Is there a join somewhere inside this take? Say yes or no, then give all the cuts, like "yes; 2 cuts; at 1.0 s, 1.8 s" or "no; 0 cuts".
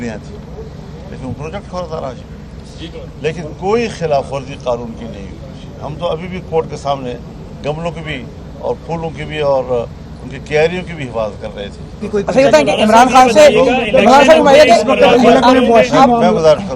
yes; 1 cut; at 12.0 s